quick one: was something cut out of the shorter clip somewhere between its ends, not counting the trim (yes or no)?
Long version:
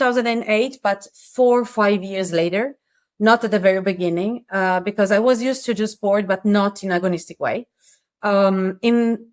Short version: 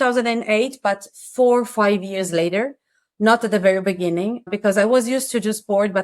yes